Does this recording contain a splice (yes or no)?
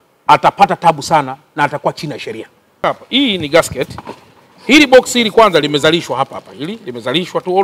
yes